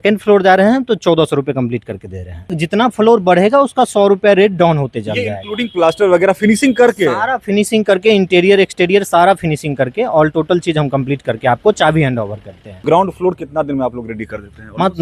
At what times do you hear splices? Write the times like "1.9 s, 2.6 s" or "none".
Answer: 2.5 s, 12.6 s